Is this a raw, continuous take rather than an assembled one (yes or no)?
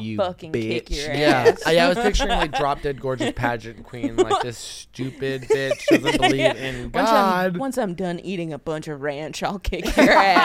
yes